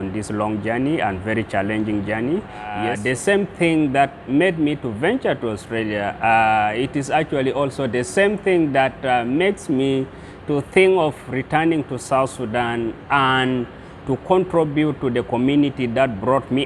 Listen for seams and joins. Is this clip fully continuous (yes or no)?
no